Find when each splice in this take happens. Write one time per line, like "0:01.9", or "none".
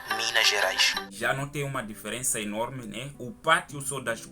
0:01.0